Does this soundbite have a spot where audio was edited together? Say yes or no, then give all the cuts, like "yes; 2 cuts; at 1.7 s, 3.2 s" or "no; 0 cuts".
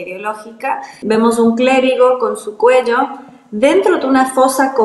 yes; 1 cut; at 0.9 s